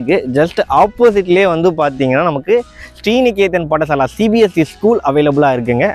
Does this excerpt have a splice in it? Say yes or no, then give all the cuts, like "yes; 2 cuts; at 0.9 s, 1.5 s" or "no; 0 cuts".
no; 0 cuts